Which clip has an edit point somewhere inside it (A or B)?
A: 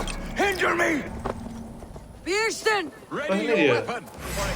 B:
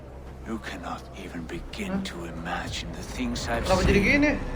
A